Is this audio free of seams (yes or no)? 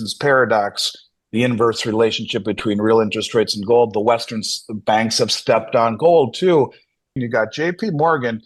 no